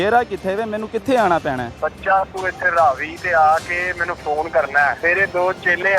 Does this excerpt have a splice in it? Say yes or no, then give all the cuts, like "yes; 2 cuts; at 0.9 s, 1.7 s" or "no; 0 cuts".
yes; 2 cuts; at 1.7 s, 5.0 s